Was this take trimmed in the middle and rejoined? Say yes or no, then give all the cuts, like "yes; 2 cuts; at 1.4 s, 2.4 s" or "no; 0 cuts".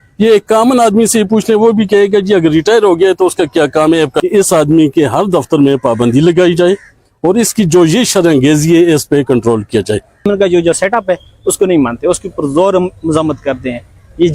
yes; 2 cuts; at 4.2 s, 10.2 s